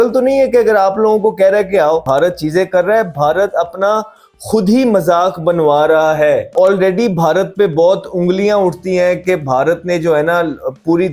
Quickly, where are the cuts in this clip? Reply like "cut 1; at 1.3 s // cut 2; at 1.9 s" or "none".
cut 1; at 2.0 s // cut 2; at 6.5 s